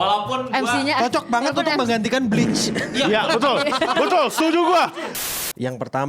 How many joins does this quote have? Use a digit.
1